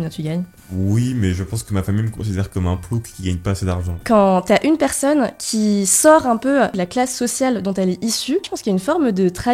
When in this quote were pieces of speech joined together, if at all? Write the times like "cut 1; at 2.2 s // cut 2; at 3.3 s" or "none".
cut 1; at 3.9 s // cut 2; at 6.8 s // cut 3; at 8.5 s